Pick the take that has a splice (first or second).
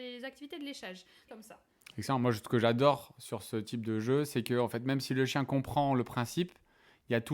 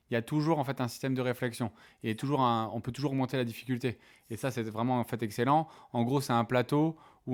first